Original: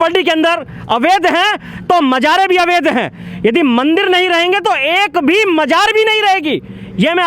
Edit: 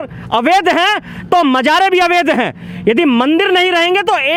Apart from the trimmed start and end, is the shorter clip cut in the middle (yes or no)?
no